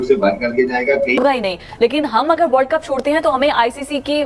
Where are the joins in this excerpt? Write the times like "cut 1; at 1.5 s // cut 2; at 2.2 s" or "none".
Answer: cut 1; at 1.2 s